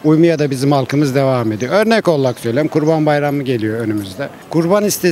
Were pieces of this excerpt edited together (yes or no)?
no